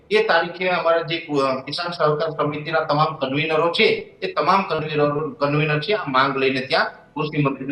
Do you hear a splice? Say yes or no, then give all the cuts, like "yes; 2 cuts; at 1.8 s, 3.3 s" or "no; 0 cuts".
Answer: no; 0 cuts